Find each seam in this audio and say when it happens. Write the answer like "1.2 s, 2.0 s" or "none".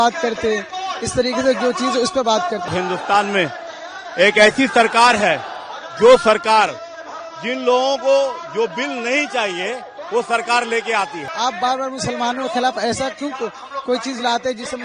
2.7 s, 11.2 s